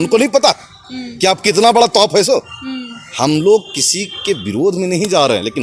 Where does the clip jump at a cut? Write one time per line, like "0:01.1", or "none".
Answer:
none